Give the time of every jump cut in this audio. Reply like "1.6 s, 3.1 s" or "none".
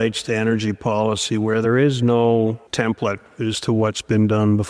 1.6 s